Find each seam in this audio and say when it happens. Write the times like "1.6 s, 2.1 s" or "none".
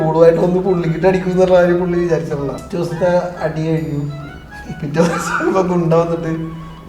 2.6 s